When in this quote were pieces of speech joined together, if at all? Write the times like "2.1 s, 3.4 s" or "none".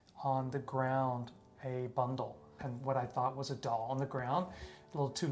2.5 s